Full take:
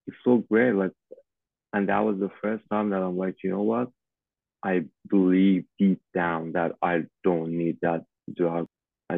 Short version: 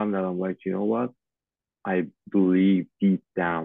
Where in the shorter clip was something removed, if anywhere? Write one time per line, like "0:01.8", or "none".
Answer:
none